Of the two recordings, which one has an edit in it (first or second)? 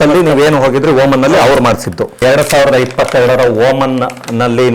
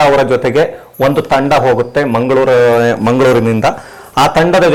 first